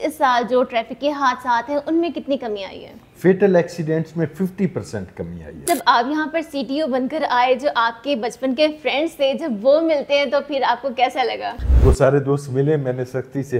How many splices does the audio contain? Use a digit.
2